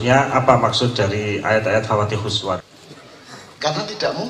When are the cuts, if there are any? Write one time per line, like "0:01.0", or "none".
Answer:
0:02.6